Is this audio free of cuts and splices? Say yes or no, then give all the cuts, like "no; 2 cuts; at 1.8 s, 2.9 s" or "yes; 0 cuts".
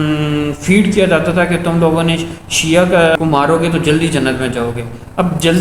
yes; 0 cuts